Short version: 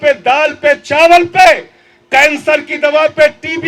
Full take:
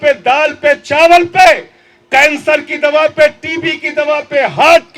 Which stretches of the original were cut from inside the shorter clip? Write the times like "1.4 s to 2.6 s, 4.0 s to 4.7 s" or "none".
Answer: none